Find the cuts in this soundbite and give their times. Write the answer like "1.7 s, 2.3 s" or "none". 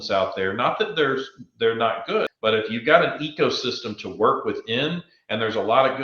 2.3 s